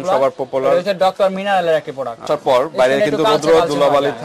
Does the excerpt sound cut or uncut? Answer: cut